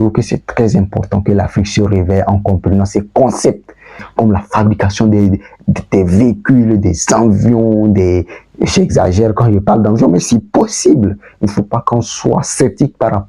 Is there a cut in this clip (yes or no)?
yes